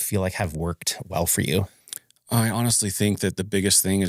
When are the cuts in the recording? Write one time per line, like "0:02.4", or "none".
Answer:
none